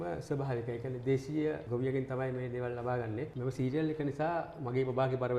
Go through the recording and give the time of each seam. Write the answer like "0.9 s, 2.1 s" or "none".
3.3 s